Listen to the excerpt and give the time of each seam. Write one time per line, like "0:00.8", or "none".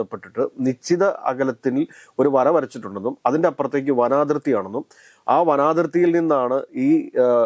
none